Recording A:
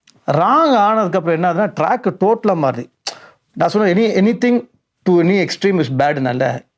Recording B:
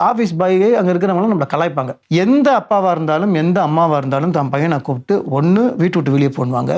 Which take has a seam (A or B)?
B